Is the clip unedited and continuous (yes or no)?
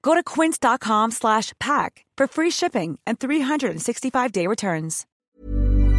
no